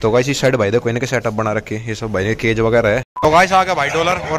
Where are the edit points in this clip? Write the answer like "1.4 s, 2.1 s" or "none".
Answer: 3.2 s